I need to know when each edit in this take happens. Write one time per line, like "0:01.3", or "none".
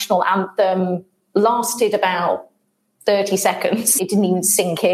0:04.0